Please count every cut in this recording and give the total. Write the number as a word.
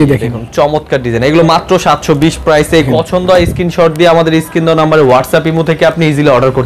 one